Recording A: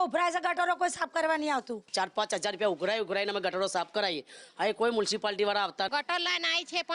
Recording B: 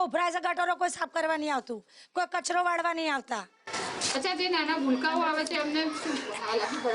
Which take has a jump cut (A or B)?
A